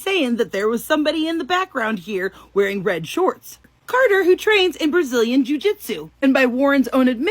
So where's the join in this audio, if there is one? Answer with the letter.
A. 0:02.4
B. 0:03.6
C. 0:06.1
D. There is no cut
B